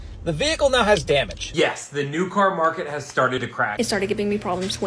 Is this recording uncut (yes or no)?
no